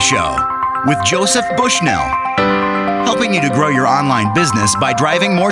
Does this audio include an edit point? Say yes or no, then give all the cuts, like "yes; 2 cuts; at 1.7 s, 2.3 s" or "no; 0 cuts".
no; 0 cuts